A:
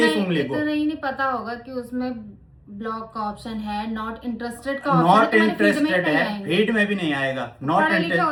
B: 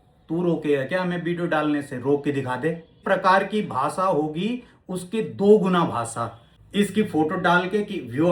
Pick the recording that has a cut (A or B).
B